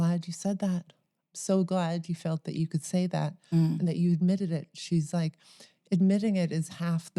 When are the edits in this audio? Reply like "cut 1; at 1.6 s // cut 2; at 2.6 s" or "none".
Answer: none